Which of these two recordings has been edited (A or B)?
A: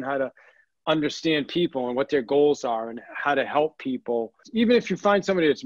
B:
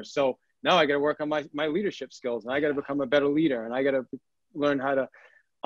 A